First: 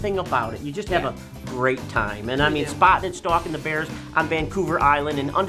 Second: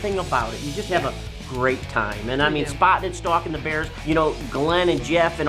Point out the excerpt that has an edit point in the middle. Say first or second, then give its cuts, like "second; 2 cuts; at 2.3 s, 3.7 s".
second; 1 cut; at 3.9 s